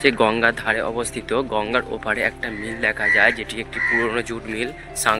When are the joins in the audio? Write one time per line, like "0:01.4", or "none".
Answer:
none